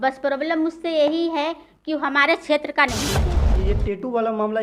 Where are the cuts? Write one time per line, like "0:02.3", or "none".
0:03.5